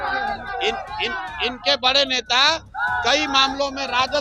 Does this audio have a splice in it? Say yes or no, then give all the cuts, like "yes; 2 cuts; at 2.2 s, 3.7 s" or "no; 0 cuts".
no; 0 cuts